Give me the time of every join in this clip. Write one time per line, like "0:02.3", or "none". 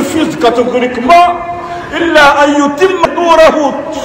0:03.1